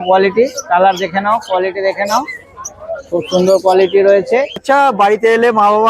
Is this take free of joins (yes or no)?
no